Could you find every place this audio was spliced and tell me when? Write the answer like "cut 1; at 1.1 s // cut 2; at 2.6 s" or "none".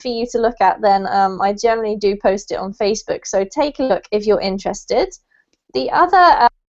cut 1; at 2.3 s

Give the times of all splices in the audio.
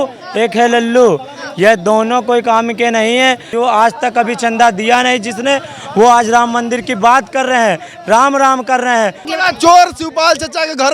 cut 1; at 3.5 s // cut 2; at 9.3 s

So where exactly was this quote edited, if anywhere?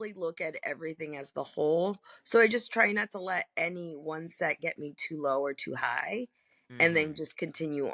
none

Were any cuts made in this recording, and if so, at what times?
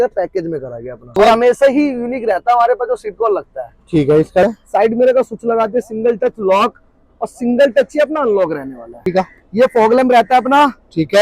cut 1; at 1.2 s // cut 2; at 4.4 s // cut 3; at 9.1 s

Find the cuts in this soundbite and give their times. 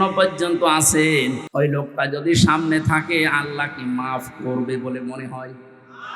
cut 1; at 1.4 s

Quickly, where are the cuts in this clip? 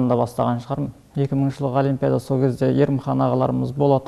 cut 1; at 1.0 s

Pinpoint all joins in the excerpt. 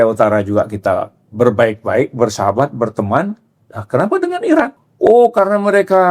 cut 1; at 4.8 s

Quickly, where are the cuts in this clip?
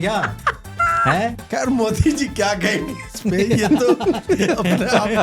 cut 1; at 1.4 s

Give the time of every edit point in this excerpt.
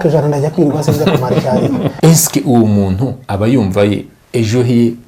cut 1; at 1.9 s

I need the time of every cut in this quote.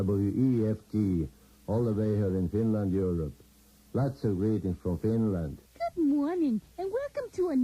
cut 1; at 4.5 s

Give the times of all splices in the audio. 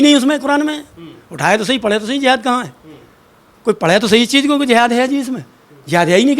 none

